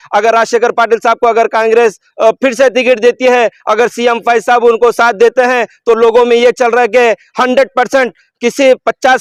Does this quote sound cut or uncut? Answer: uncut